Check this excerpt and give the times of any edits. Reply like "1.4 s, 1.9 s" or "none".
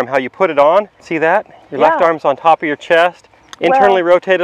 1.0 s